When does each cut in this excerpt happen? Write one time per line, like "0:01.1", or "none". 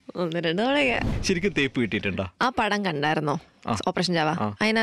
0:01.1